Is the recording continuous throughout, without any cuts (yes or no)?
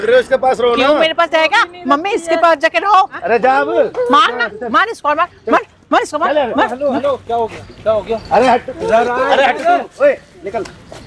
no